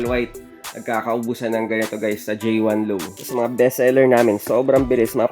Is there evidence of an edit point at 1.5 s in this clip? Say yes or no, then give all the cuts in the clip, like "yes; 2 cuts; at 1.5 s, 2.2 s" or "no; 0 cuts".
no; 1 cut; at 3.1 s